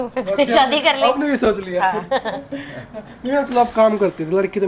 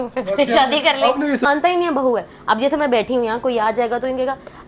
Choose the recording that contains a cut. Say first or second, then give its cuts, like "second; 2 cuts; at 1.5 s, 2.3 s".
second; 1 cut; at 1.5 s